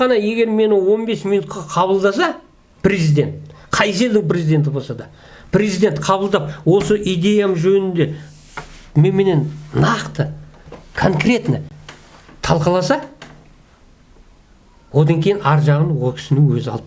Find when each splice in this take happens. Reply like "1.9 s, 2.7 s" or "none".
none